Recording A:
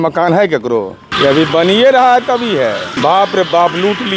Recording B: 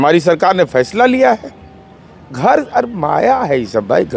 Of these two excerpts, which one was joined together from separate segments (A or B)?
A